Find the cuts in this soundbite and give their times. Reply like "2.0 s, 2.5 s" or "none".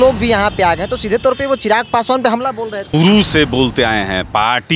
2.9 s